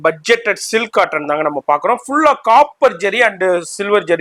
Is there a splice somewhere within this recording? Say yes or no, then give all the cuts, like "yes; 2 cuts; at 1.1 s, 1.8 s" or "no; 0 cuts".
no; 0 cuts